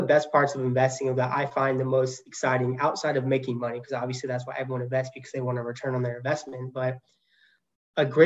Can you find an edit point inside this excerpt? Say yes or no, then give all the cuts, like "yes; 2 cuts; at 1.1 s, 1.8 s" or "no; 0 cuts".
no; 0 cuts